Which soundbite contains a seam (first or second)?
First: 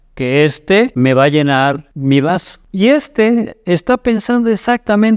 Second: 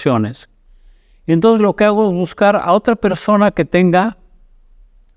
first